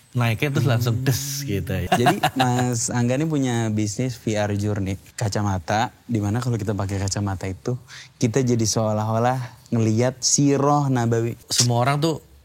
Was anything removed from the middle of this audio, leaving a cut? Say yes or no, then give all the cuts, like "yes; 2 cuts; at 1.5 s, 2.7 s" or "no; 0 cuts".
yes; 3 cuts; at 1.9 s, 5.1 s, 11.5 s